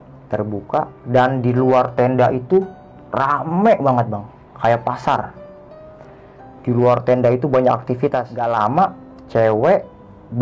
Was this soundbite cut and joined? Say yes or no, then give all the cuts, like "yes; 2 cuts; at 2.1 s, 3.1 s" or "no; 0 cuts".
yes; 1 cut; at 8.4 s